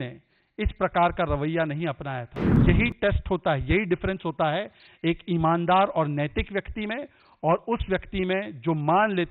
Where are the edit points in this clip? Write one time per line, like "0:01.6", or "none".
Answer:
0:02.6